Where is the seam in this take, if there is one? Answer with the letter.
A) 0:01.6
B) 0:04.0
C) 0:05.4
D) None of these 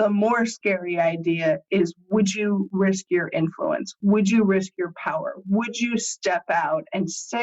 D